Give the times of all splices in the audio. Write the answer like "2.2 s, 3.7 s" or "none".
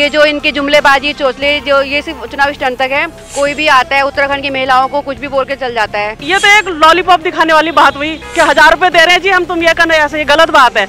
3.2 s, 6.2 s, 8.2 s